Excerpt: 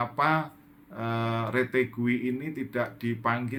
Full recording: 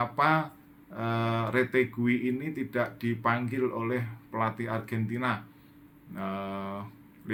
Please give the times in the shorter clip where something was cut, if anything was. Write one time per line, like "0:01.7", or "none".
none